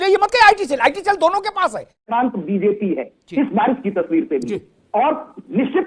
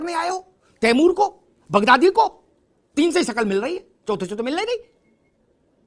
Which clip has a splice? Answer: first; 1 cut; at 2.1 s

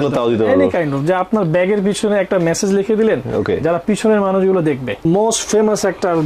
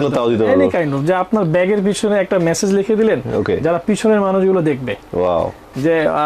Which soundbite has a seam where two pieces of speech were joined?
first; 1 cut; at 5.1 s

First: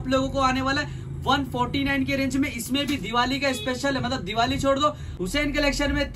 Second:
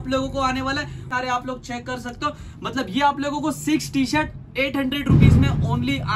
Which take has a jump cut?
second; 1 cut; at 1.1 s

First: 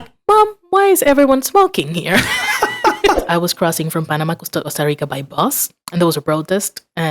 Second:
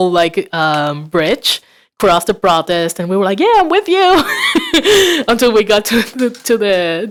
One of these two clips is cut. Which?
first; 3 cuts; at 3.2 s, 4.7 s, 6.2 s

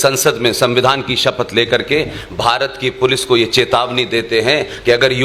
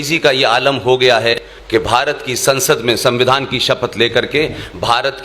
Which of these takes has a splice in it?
second; 1 cut; at 1.5 s

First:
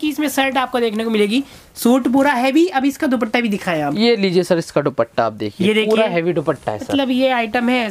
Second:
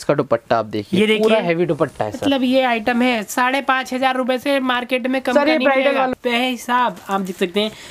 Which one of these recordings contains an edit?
second; 1 cut; at 6.1 s

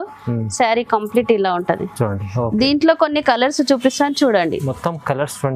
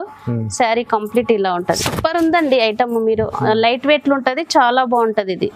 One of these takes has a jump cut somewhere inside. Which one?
second; 1 cut; at 1.8 s

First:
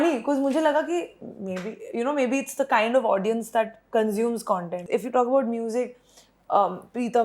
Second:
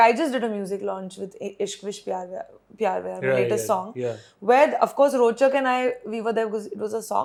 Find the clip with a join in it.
first; 1 cut; at 4.8 s

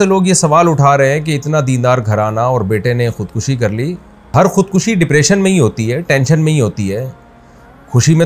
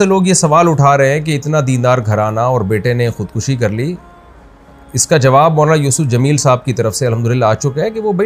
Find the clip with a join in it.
first; 1 cut; at 4.3 s

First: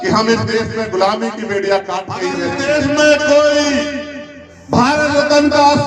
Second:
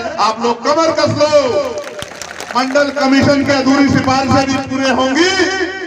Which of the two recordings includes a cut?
first; 1 cut; at 2.3 s

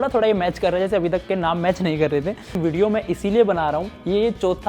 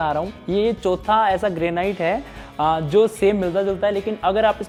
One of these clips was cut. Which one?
first; 1 cut; at 2.6 s

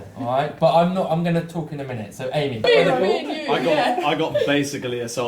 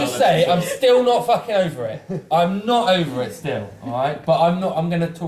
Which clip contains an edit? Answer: first; 1 cut; at 2.6 s

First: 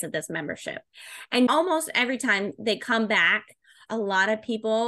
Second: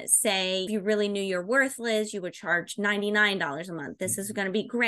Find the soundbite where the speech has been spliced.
first; 1 cut; at 3.8 s

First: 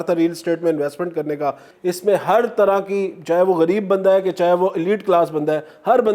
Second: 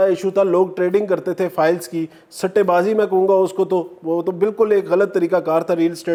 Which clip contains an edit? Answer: first; 1 cut; at 1.7 s

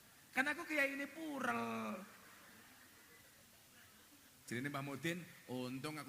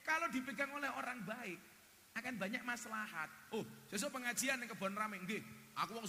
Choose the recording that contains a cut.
first; 1 cut; at 3.5 s

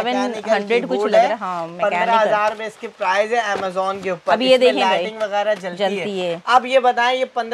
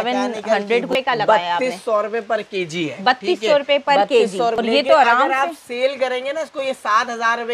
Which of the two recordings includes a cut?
second; 2 cuts; at 0.9 s, 4.5 s

